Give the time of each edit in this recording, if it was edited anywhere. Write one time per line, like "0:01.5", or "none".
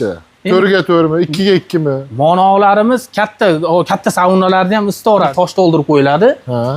0:05.3

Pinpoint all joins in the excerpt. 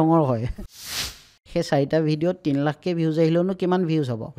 0:00.9

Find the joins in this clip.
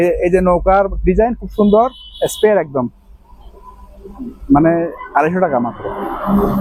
none

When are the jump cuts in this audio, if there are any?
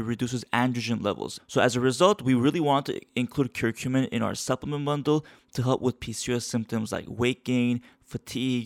0:01.3

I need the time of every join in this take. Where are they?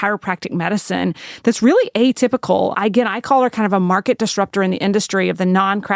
0:02.7

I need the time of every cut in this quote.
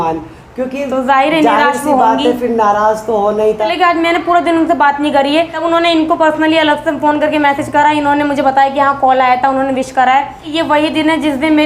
0:03.7
0:05.6
0:10.5

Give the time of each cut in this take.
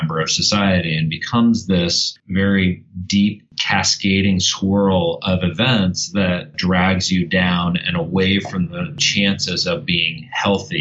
0:06.5
0:08.9

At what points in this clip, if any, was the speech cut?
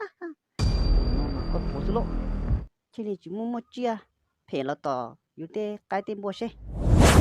0:02.7

